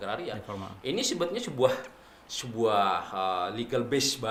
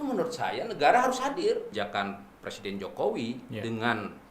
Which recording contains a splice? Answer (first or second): second